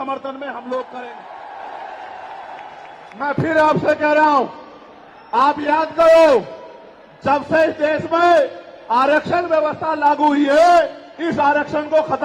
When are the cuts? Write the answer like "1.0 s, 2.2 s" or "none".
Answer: 1.0 s